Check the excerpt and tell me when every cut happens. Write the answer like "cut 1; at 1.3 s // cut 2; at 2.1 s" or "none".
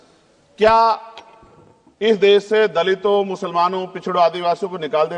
none